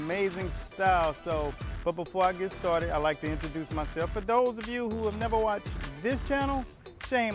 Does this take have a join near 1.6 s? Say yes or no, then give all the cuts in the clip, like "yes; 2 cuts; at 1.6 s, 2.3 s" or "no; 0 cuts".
yes; 1 cut; at 1.6 s